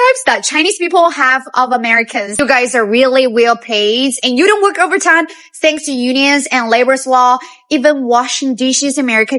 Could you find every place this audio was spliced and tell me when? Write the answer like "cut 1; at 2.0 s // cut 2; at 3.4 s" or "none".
cut 1; at 2.4 s